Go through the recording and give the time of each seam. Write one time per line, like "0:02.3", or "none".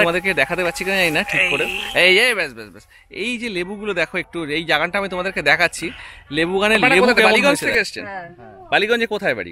0:07.4